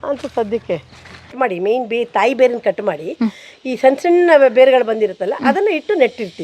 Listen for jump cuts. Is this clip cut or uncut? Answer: cut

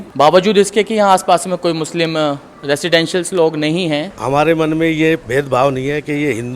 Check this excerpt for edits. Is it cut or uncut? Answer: cut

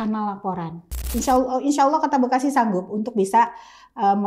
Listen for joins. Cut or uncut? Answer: cut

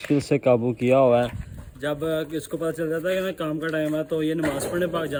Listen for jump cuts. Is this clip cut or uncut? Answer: uncut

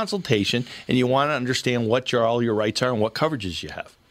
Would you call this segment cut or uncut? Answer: uncut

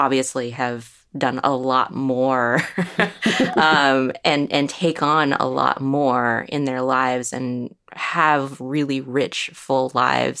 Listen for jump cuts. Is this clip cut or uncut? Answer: uncut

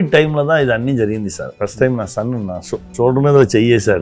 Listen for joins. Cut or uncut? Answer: cut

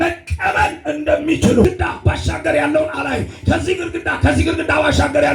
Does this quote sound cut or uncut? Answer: cut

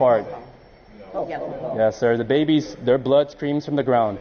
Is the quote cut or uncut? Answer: uncut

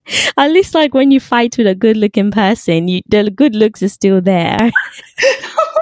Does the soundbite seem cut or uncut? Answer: cut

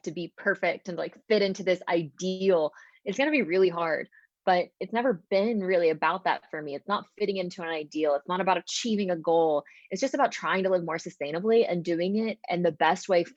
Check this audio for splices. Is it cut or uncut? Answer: uncut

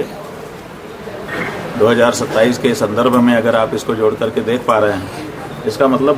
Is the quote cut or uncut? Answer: uncut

